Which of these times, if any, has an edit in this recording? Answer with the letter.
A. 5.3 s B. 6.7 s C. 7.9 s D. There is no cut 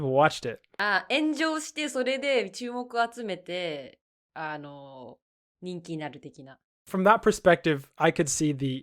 B